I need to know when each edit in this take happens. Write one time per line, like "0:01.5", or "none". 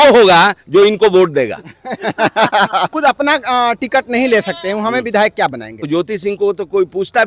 0:02.9
0:05.9

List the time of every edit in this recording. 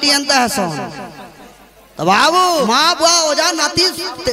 0:02.7

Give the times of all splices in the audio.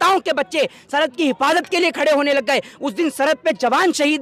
none

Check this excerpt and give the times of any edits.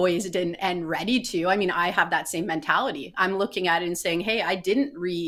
none

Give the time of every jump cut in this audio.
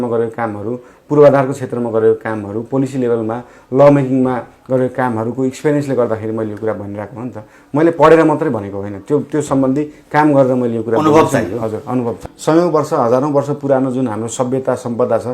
0:12.3

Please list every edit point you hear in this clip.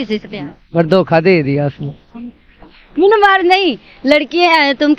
0:02.8

